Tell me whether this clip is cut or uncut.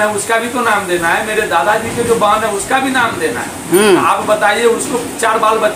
uncut